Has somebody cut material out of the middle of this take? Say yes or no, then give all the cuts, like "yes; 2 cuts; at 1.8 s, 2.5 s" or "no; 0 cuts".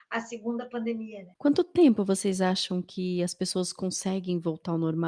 yes; 1 cut; at 1.2 s